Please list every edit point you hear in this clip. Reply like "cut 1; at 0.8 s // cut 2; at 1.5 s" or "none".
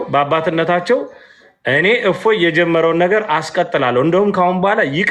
none